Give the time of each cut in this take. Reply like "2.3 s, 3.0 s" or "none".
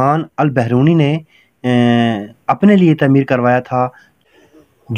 none